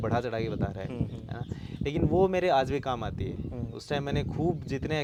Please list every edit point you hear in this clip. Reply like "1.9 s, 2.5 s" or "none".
none